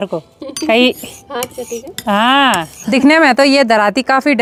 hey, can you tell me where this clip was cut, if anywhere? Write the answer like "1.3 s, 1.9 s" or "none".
none